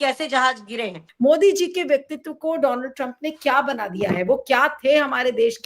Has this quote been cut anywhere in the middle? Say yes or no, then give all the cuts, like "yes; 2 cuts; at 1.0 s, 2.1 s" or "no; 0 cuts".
yes; 1 cut; at 1.0 s